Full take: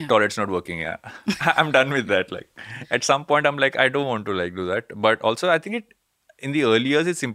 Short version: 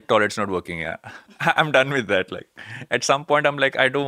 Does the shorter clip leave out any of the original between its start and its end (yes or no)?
no